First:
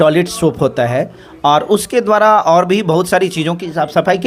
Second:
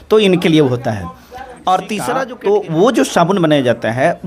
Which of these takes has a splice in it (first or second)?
second